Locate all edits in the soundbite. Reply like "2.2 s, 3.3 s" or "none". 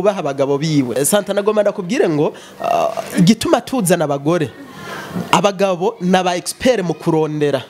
1.0 s